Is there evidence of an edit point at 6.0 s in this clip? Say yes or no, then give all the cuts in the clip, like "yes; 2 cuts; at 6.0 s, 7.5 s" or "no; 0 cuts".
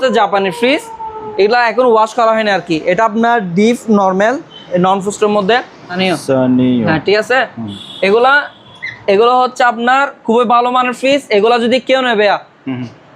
yes; 1 cut; at 6.0 s